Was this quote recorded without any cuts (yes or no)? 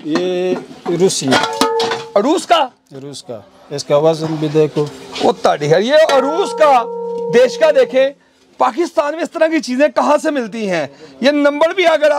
yes